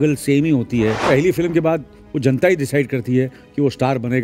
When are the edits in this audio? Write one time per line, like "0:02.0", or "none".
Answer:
0:01.0